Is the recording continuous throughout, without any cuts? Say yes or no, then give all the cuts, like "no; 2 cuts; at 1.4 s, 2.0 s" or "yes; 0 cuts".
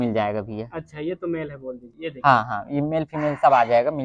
yes; 0 cuts